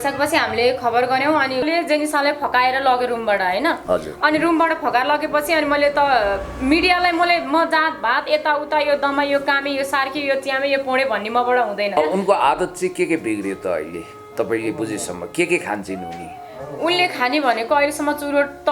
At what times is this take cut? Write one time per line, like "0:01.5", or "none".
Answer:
0:01.6
0:12.0